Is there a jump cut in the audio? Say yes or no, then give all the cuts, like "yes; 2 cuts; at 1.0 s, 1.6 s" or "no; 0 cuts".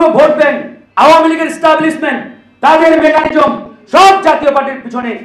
no; 0 cuts